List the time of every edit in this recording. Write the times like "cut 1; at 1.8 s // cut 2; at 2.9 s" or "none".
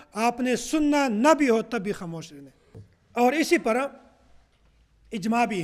none